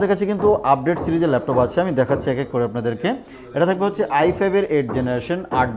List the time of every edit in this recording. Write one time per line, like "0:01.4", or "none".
none

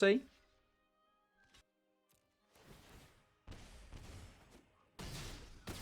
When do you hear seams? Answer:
0:01.6

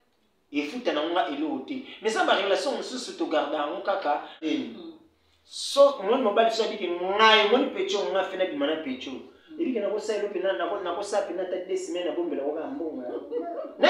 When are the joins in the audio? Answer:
0:04.5

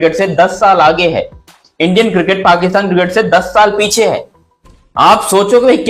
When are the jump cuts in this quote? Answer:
none

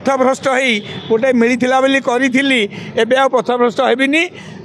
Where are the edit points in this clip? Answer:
none

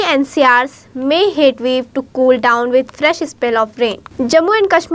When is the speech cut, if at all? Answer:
0:04.0

